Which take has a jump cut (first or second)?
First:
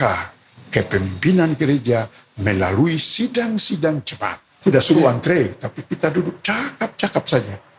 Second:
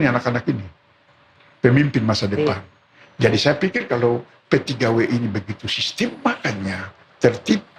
first